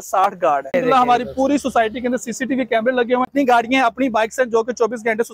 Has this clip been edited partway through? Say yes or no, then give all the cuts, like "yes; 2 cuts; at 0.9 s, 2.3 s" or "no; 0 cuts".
yes; 2 cuts; at 0.7 s, 3.3 s